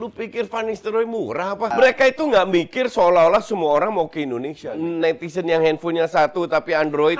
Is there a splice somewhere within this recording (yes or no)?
yes